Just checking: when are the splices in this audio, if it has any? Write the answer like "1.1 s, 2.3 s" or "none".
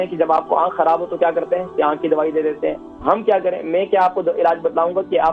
none